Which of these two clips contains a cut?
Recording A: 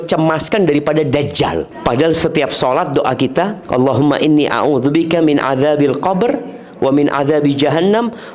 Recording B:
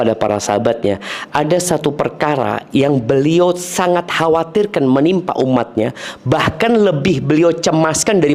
A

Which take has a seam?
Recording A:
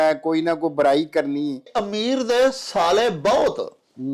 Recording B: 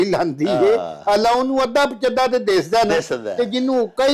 A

